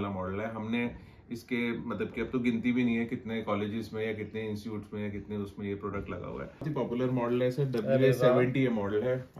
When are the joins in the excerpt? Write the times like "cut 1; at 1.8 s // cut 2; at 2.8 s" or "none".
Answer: cut 1; at 6.7 s